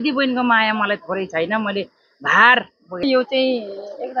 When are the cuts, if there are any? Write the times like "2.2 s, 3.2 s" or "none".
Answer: 3.0 s

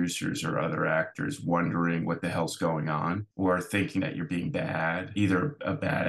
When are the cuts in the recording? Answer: 3.3 s, 5.1 s

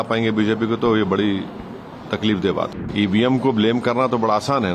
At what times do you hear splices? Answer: 2.8 s

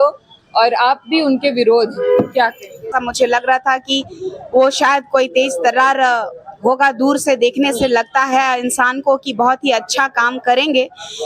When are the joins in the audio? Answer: 2.9 s

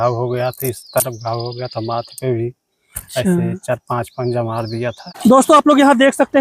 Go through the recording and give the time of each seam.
5.1 s

